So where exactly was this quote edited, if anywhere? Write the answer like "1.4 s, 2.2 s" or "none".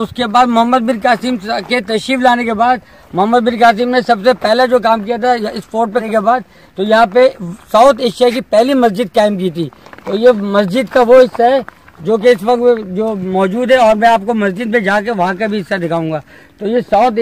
none